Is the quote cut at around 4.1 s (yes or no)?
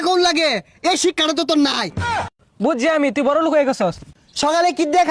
yes